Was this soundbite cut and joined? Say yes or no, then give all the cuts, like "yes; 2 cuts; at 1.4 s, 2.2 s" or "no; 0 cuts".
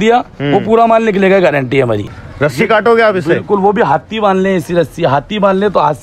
yes; 1 cut; at 2.2 s